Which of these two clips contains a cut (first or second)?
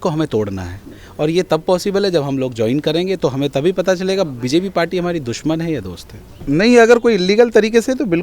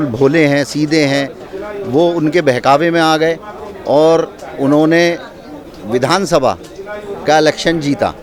first